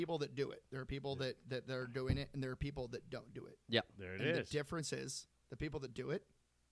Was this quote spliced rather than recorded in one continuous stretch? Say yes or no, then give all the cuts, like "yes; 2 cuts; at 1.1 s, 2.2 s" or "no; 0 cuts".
no; 0 cuts